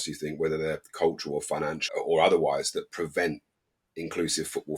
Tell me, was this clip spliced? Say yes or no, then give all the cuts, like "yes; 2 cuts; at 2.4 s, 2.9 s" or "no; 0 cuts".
yes; 1 cut; at 1.9 s